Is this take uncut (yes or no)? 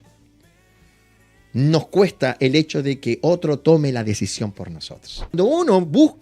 no